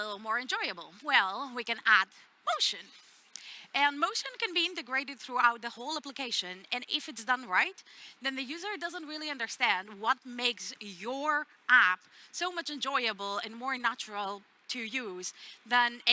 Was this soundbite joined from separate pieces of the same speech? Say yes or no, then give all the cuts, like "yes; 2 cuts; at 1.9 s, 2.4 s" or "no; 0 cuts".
no; 0 cuts